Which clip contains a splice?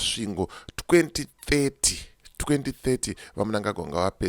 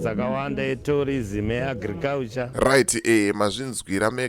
second; 1 cut; at 2.5 s

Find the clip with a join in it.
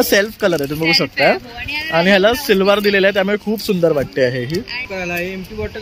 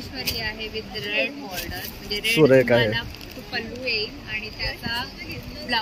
first; 1 cut; at 4.8 s

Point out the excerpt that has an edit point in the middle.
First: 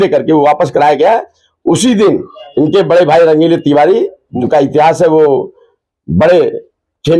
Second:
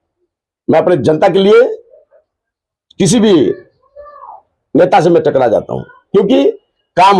first; 2 cuts; at 2.4 s, 4.2 s

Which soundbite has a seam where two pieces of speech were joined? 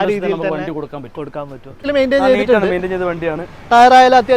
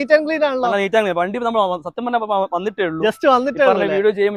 first; 1 cut; at 1.8 s

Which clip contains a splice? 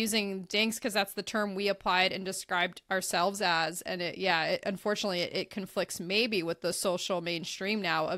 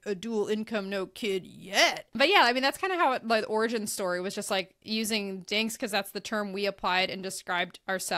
second; 1 cut; at 2.0 s

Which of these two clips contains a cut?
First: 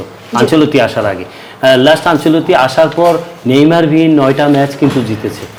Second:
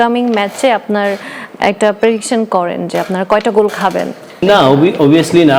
second; 1 cut; at 4.4 s

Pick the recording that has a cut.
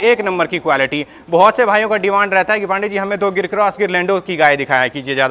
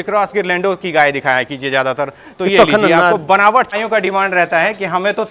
second; 1 cut; at 3.7 s

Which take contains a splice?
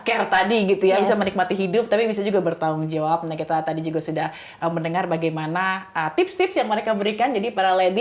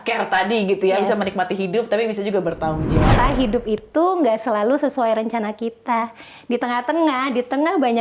second; 1 cut; at 3.1 s

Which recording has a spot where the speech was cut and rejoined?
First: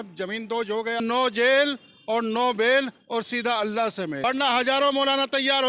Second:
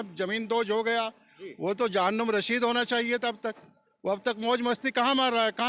first; 2 cuts; at 1.0 s, 4.2 s

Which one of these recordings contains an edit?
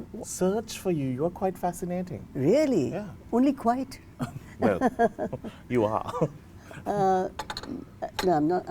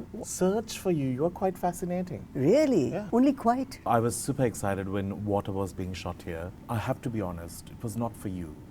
second; 3 cuts; at 3.0 s, 3.9 s, 6.6 s

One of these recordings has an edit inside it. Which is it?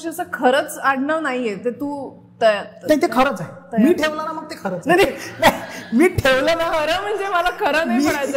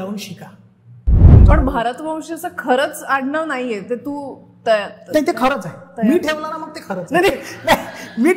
second; 1 cut; at 1.3 s

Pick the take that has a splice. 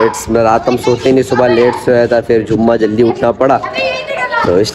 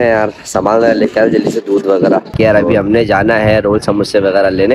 second; 1 cut; at 2.3 s

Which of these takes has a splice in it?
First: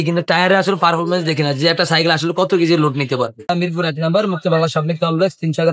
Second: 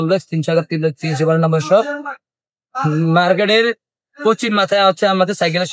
first; 1 cut; at 3.4 s

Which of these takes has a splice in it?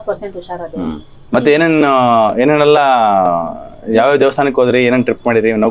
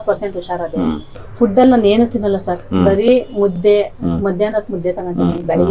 second; 1 cut; at 1.1 s

